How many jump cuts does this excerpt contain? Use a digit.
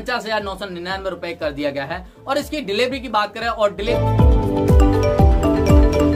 1